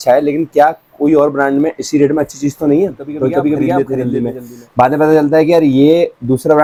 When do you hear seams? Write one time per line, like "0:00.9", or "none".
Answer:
none

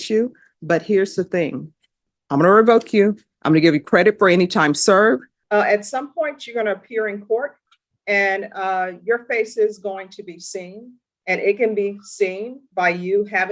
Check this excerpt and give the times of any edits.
0:02.1
0:05.3

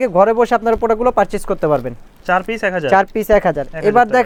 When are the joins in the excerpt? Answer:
none

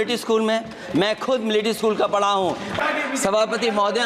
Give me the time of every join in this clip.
0:02.7

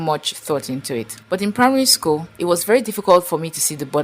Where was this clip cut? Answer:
0:01.2
0:02.3

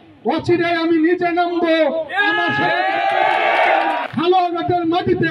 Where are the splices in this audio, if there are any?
0:04.1

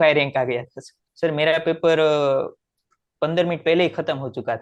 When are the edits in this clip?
0:01.0

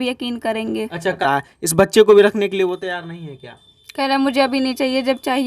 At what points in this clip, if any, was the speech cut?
0:01.2

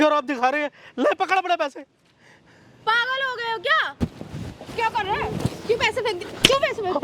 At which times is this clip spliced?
0:03.9

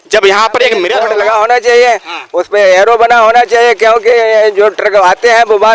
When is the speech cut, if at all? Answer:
0:00.9

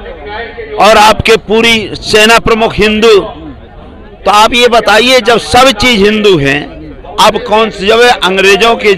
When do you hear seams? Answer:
none

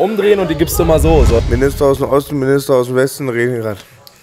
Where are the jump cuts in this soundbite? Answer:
0:01.4

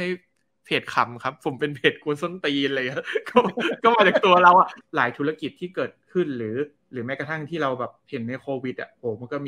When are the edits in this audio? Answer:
0:04.8
0:06.8

